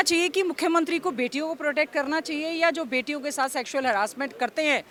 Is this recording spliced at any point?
no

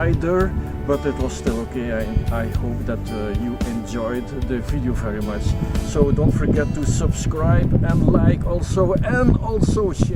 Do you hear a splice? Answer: no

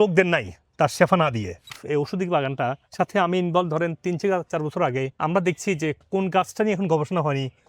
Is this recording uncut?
no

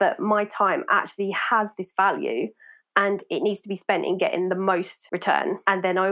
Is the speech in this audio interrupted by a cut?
yes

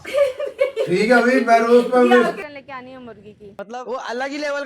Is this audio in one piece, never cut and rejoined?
no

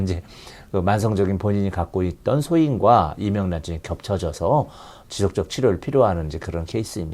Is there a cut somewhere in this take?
no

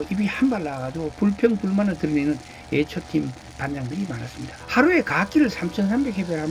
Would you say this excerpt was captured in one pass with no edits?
no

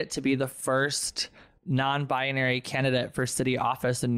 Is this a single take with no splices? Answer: yes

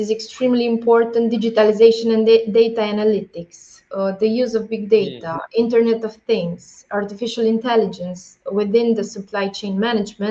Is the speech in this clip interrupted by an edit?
no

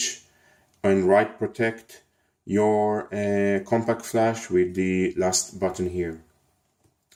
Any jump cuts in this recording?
no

